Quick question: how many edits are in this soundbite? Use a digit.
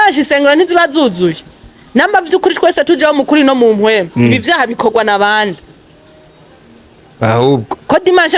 0